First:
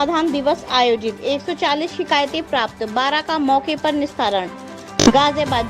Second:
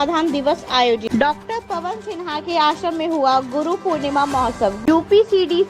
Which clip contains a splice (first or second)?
second